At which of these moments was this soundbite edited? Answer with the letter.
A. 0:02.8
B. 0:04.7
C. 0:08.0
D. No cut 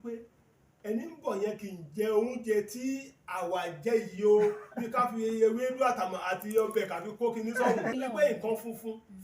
C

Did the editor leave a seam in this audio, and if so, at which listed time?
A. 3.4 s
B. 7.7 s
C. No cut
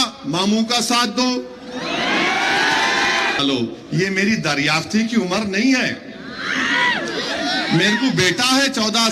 A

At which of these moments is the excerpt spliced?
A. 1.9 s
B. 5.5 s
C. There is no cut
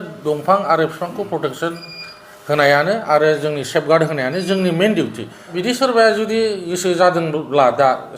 B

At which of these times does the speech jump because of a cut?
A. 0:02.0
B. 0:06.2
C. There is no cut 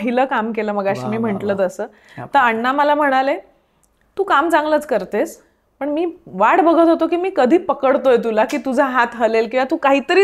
C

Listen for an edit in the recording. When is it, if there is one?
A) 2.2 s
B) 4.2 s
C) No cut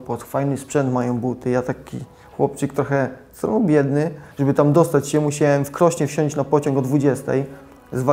B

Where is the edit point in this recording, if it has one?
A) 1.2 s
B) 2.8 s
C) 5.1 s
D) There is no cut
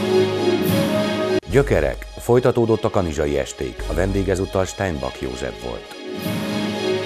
A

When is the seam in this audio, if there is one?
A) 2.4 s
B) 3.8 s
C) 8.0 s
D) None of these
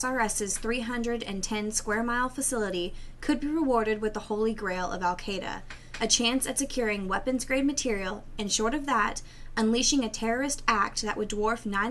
C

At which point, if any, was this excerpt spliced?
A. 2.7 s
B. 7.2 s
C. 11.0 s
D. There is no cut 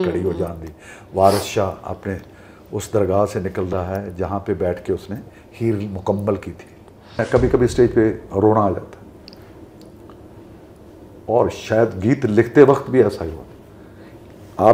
B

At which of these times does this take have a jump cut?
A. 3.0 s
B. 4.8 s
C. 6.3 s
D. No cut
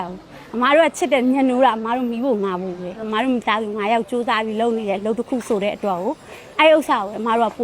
A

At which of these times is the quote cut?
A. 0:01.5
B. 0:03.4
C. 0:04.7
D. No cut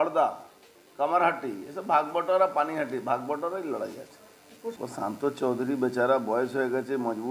C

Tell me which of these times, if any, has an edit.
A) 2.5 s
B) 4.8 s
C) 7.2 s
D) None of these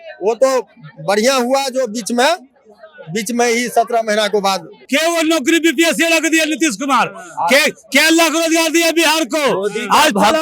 B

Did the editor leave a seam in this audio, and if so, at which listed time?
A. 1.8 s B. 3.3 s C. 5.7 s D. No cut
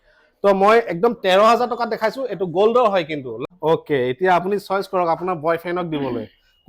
B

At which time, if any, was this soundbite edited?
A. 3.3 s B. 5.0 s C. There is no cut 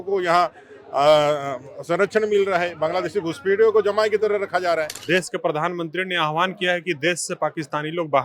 B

